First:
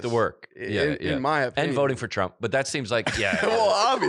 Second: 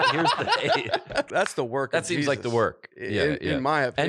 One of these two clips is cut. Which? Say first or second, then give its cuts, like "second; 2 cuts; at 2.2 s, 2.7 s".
second; 1 cut; at 1.3 s